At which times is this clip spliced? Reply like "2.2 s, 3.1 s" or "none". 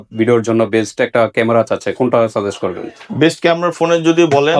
none

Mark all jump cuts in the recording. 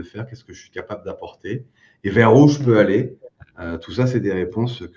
none

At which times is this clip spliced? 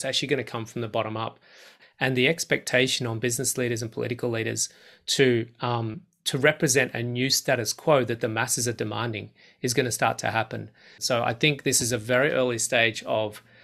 1.7 s, 10.9 s

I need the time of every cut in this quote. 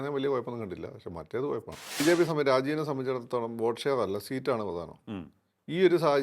2.0 s

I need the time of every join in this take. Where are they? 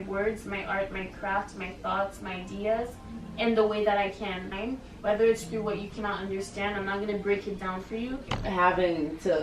4.4 s, 8.3 s

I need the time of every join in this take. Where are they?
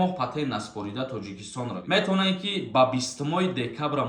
1.8 s

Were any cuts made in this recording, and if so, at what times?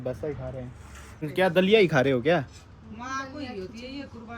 1.3 s

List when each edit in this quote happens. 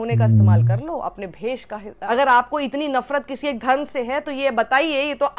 2.0 s

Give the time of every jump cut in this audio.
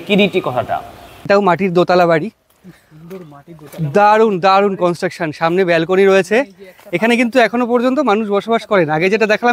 1.1 s

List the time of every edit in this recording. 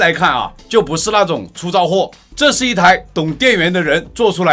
2.2 s

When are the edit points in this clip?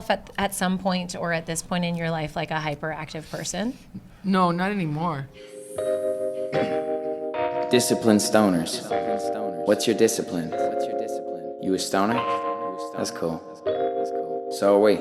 5.7 s

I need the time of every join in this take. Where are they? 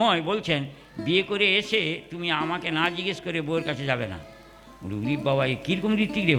none

